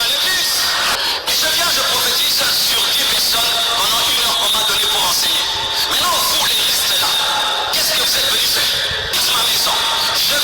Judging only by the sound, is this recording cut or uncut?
cut